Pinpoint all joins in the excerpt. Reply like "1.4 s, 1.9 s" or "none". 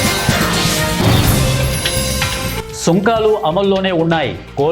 2.6 s